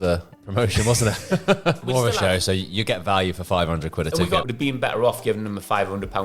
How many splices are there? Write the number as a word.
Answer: two